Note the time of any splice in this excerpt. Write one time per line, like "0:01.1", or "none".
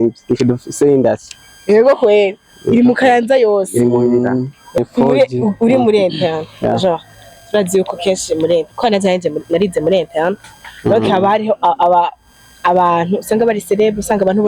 0:04.8

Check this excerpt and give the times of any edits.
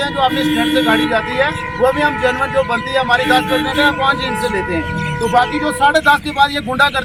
none

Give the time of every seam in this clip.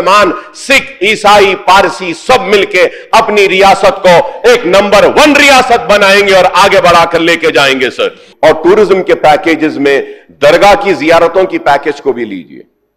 0:08.2

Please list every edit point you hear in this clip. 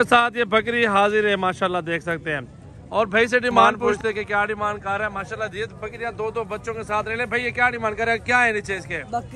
0:03.7

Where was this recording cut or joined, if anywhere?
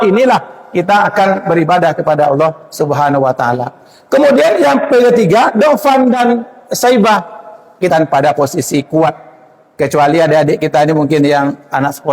0:07.9

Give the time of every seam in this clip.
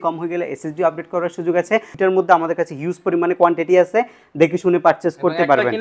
0:01.9

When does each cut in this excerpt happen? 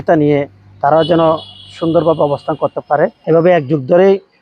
0:03.2

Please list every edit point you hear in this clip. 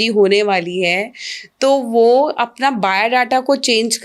none

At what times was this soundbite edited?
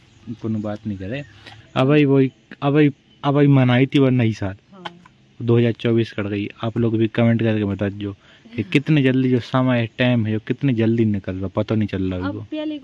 0:01.5

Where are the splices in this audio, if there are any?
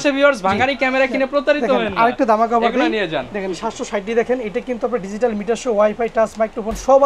none

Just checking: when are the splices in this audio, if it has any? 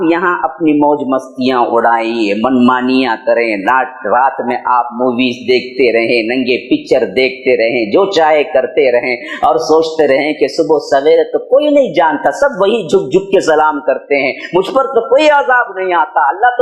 none

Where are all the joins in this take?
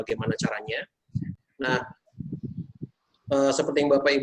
0:01.3

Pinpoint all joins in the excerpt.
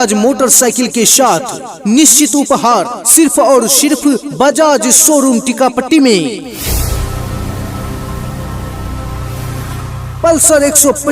0:06.5
0:08.2
0:10.0

